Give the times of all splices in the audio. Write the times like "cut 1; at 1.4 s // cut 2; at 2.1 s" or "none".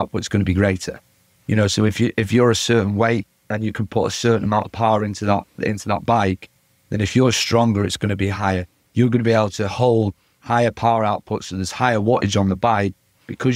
none